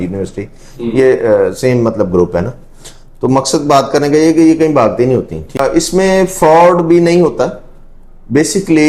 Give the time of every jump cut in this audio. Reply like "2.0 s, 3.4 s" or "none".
5.6 s